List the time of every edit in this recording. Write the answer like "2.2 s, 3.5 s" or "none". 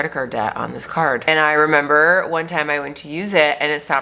1.2 s